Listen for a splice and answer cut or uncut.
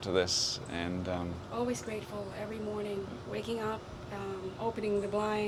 uncut